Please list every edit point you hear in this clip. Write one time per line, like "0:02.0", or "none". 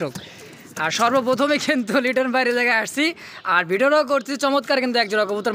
none